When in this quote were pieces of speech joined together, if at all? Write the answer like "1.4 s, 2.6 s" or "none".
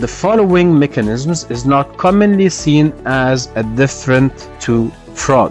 4.5 s